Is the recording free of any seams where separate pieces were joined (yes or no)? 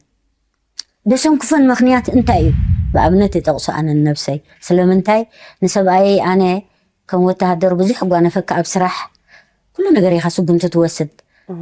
no